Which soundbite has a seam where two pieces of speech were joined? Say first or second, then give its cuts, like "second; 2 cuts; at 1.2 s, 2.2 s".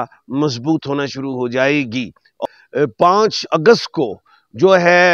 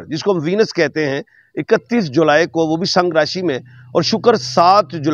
first; 1 cut; at 2.4 s